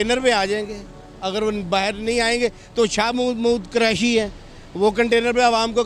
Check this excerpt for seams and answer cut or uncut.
uncut